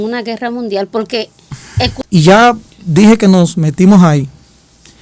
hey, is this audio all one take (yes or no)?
no